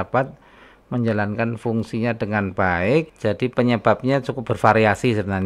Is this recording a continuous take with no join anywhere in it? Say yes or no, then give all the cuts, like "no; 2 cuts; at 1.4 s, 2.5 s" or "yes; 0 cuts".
no; 1 cut; at 3.1 s